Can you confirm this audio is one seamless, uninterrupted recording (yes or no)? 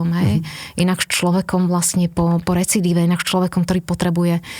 yes